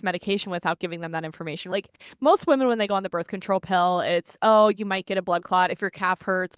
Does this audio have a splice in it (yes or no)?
no